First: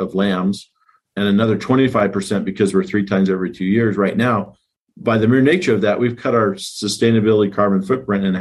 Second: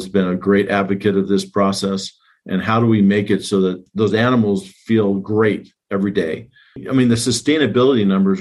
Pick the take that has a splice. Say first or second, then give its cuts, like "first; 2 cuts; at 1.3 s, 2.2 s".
second; 2 cuts; at 3.9 s, 6.8 s